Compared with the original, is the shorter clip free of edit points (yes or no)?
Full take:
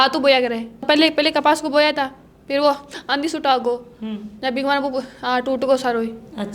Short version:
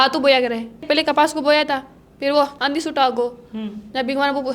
no